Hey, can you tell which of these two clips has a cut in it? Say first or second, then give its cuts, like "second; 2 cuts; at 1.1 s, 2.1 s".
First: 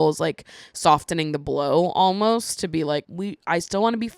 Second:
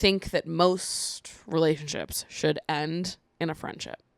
first; 1 cut; at 3.1 s